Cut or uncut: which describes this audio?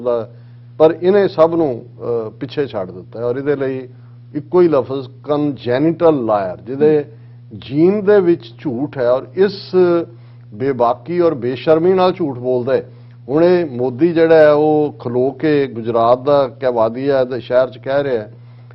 uncut